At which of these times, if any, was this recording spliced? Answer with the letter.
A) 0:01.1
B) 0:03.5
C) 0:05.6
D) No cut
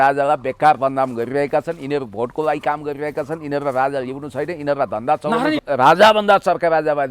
C